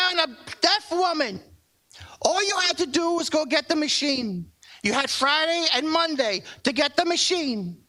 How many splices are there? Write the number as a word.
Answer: zero